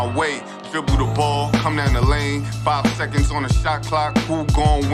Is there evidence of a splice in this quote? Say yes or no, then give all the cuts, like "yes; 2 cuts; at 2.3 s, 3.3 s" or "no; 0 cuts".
no; 0 cuts